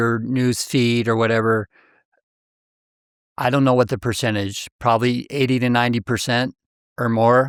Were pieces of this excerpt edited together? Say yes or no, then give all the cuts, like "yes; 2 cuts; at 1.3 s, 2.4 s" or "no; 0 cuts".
no; 0 cuts